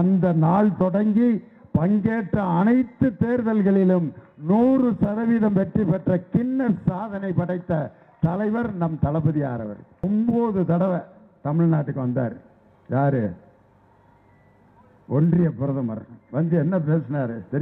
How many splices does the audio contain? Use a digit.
1